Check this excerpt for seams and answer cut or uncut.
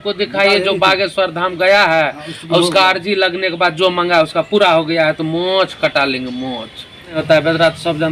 cut